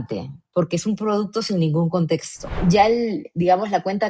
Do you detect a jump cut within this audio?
yes; 1 cut; at 2.5 s

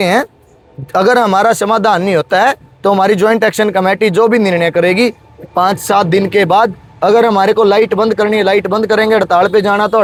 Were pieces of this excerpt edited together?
no; 0 cuts

